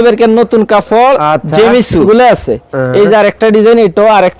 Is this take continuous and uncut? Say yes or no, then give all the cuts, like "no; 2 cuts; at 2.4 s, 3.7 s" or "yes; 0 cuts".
no; 1 cut; at 2.0 s